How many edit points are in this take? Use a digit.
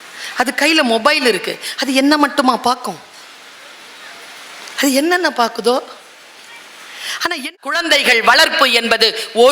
1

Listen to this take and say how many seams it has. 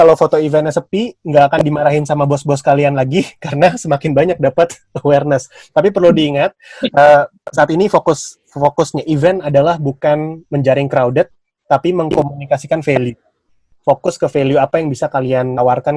0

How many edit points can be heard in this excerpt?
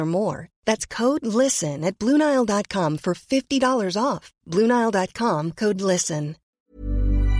1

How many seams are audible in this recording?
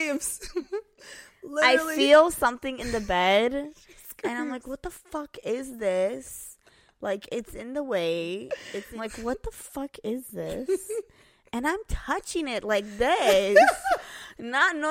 1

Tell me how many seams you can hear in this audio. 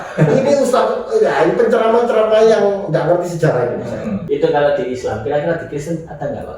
1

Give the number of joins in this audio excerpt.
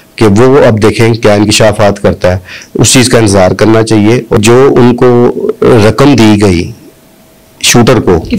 1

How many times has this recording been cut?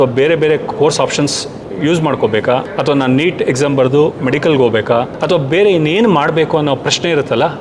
0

